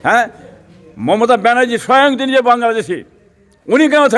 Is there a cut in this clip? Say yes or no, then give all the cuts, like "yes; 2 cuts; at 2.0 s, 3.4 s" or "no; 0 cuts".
no; 0 cuts